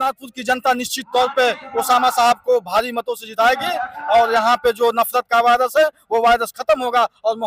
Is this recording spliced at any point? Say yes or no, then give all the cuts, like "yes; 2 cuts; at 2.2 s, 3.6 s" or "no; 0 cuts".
no; 0 cuts